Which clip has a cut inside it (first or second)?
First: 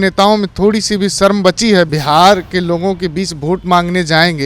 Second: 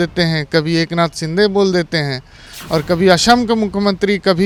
first